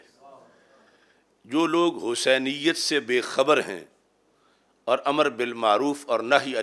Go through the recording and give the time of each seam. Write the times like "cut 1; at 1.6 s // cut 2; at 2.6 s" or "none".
none